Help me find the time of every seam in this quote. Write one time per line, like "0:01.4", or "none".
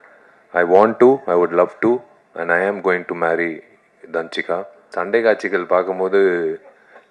0:04.8